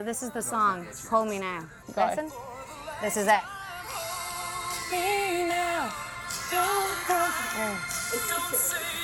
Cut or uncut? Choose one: cut